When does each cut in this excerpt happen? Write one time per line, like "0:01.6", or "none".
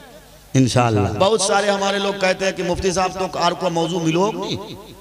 0:01.1

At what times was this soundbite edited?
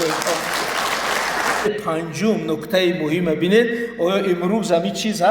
0:01.7

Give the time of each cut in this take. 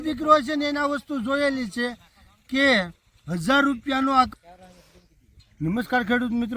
0:04.3

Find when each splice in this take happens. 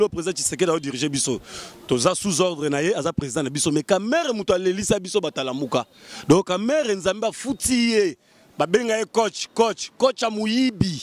none

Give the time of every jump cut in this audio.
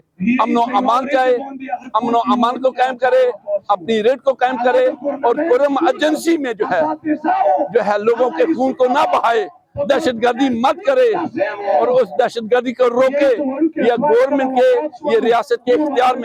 none

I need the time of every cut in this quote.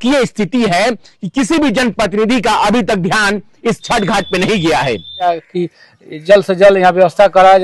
0:05.3

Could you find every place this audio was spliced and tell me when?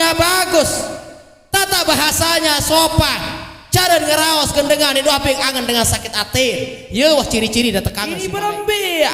0:08.2

